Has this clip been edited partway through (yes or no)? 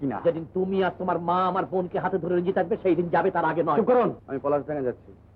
yes